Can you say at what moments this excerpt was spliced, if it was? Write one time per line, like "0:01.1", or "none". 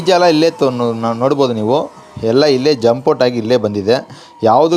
none

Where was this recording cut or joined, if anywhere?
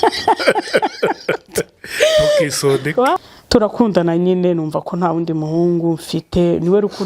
0:03.2

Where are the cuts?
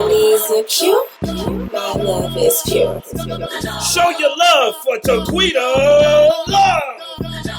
none

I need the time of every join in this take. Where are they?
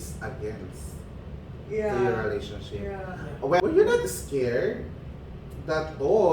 0:03.6

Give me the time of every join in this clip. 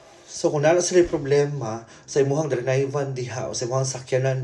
none

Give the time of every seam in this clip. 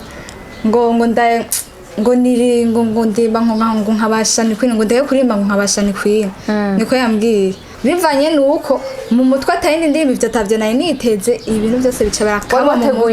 0:07.7

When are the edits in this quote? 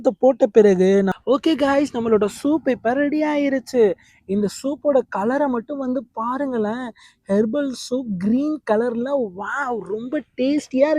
0:01.1

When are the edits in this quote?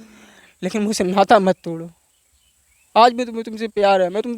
none

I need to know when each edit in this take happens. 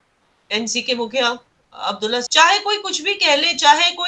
0:02.3

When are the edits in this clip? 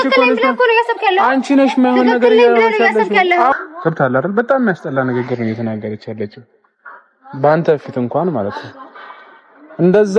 0:03.5

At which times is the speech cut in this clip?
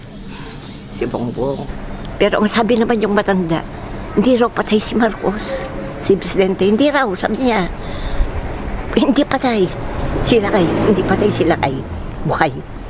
0:01.7

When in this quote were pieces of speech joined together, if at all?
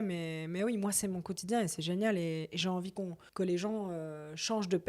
0:03.2

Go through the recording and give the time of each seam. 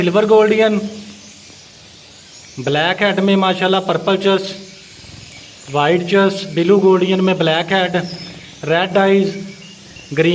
none

